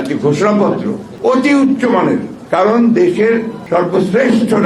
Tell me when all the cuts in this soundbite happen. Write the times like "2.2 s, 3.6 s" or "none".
1.0 s, 2.4 s, 3.6 s